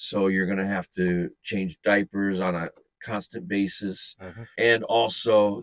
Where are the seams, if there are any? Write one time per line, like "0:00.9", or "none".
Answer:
0:04.5